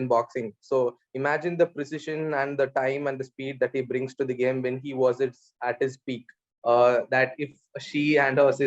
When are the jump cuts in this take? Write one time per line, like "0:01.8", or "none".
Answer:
0:06.4